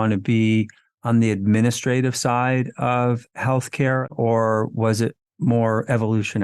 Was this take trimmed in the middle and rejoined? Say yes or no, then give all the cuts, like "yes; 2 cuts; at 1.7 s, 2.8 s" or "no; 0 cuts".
yes; 1 cut; at 4.1 s